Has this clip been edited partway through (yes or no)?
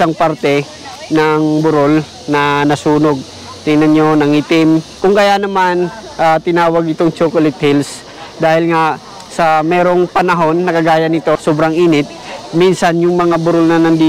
no